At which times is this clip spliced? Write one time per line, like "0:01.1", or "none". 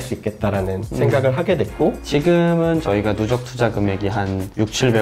0:02.0